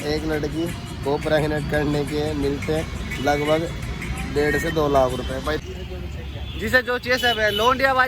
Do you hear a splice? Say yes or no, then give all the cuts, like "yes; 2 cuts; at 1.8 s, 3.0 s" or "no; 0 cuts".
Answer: yes; 1 cut; at 5.6 s